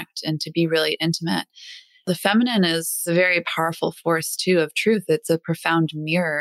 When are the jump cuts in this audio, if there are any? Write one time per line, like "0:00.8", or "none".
0:02.0
0:03.1